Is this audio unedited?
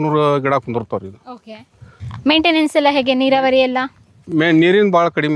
yes; 0 cuts

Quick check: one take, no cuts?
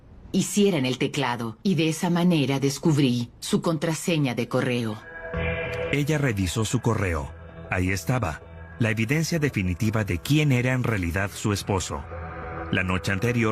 no; 1 cut; at 12.6 s

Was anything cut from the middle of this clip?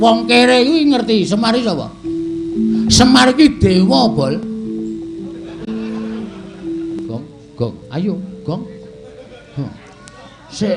yes; 1 cut; at 7.1 s

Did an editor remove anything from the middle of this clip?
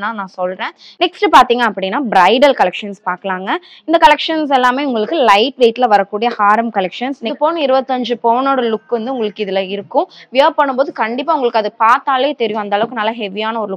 yes; 2 cuts; at 1.0 s, 7.2 s

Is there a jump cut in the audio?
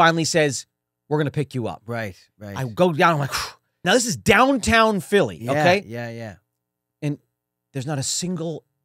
yes; 1 cut; at 3.8 s

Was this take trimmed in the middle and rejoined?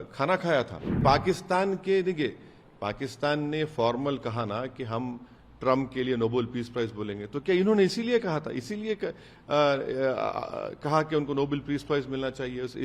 yes; 1 cut; at 1.0 s

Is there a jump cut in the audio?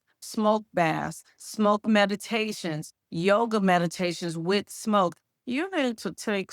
yes; 1 cut; at 5.3 s

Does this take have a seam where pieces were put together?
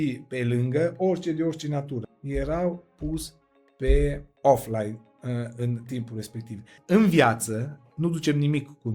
yes; 3 cuts; at 2.1 s, 4.3 s, 6.8 s

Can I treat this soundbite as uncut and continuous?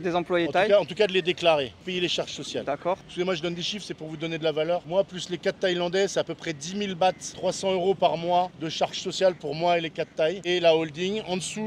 yes; 0 cuts

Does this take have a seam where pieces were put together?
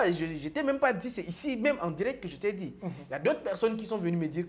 no; 0 cuts

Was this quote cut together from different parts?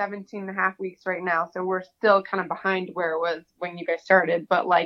no; 0 cuts

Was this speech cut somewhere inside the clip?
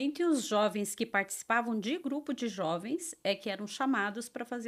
no; 0 cuts

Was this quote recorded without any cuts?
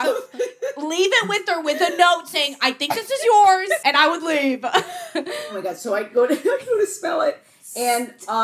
no; 2 cuts; at 3.8 s, 5.4 s

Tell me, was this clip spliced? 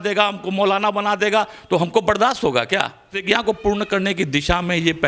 yes; 1 cut; at 3.2 s

